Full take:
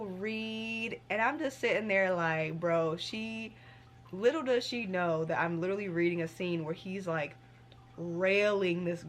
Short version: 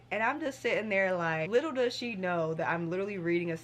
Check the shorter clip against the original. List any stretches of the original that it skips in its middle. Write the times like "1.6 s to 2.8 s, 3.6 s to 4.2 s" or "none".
2.5 s to 4.2 s

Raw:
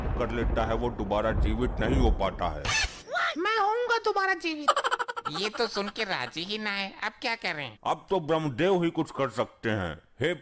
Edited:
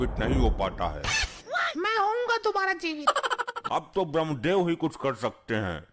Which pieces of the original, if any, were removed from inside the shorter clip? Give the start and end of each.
5.2 s to 7.7 s

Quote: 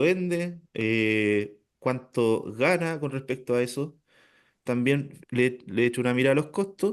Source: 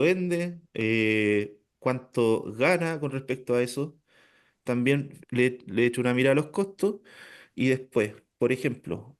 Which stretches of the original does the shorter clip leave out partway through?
none

